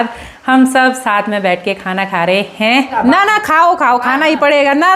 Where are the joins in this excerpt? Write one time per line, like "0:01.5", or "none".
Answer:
0:02.9